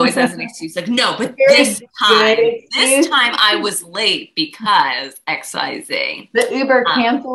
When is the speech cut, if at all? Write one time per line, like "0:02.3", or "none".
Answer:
none